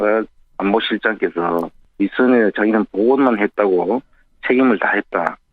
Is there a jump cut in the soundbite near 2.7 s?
no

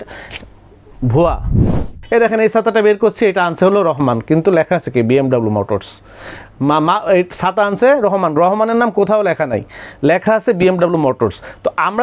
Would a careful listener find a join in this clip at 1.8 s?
yes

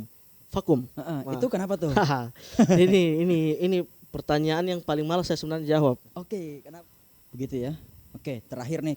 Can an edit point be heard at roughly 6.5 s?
yes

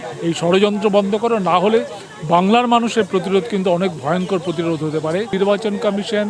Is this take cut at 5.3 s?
yes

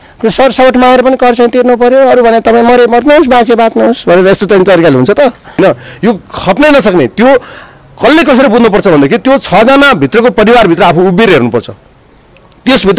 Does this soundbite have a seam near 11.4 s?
no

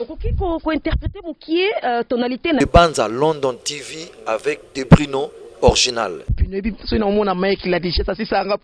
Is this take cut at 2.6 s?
yes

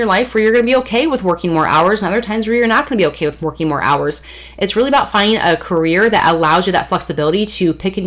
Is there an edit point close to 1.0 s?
no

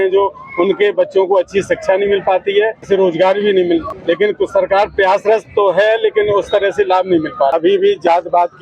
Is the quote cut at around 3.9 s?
yes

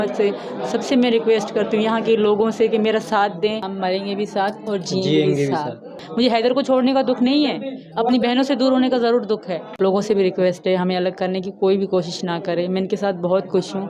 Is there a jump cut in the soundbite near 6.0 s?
yes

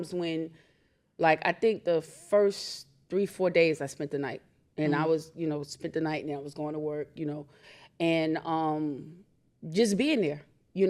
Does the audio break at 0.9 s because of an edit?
no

